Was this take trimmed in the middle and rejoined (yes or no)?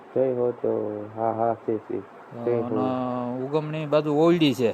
yes